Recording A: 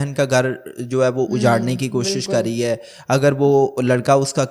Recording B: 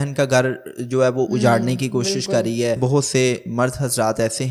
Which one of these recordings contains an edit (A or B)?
B